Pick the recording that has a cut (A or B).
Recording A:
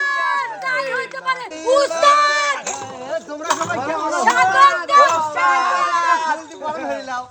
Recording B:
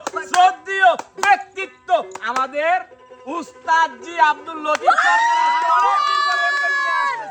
A